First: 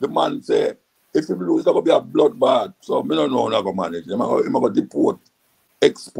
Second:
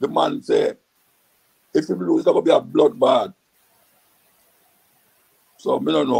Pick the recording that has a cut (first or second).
first